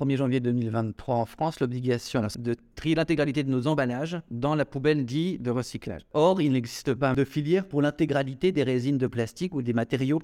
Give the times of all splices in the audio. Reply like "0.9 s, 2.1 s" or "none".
2.3 s, 6.1 s, 7.1 s